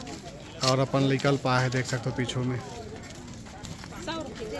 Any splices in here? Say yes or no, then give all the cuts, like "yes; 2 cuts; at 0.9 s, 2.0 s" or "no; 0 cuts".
no; 0 cuts